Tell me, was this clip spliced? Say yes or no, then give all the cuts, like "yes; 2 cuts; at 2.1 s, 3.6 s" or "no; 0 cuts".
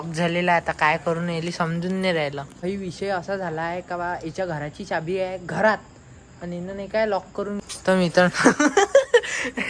yes; 2 cuts; at 2.6 s, 7.7 s